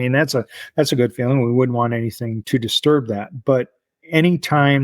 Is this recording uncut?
no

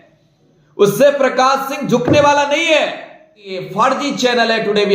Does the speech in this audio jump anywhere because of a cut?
yes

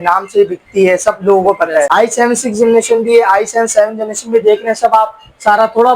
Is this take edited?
yes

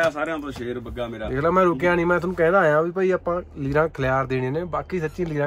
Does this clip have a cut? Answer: no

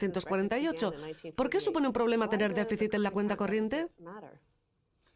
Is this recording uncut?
yes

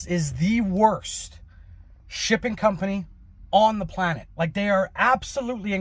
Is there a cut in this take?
no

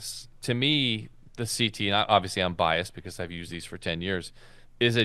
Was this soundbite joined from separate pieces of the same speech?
no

